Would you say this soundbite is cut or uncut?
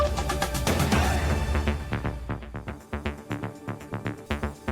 cut